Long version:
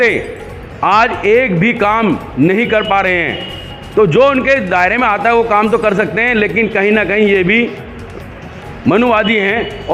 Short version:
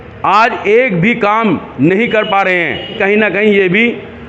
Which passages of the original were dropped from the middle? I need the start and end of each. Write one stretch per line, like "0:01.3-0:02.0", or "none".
0:03.5-0:06.7